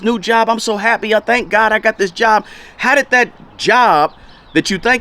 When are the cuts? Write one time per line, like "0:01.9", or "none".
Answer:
none